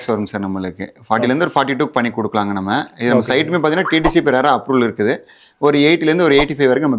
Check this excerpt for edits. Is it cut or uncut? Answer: uncut